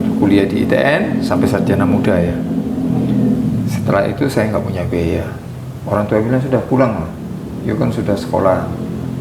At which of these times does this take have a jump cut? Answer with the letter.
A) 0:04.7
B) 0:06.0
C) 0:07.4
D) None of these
D